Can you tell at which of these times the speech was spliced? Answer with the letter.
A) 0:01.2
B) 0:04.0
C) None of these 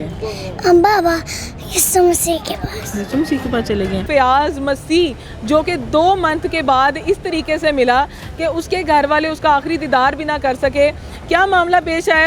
B